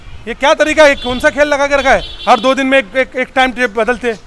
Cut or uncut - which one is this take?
uncut